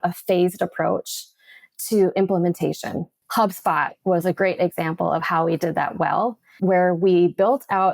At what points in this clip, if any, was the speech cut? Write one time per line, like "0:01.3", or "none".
0:03.2
0:06.6